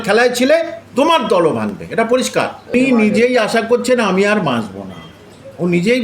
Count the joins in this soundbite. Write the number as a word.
one